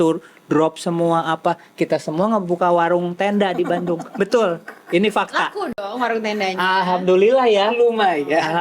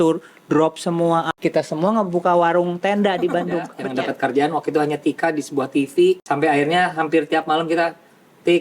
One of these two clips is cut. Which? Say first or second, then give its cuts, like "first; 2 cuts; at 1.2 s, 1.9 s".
second; 3 cuts; at 1.3 s, 3.8 s, 6.2 s